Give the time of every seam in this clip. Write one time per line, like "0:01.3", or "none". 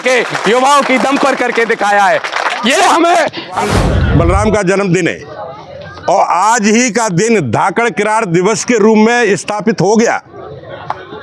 0:03.7